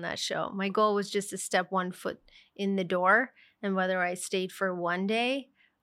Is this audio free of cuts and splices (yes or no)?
yes